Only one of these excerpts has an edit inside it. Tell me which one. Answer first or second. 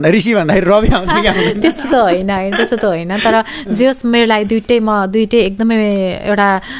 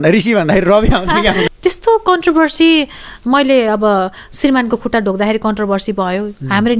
second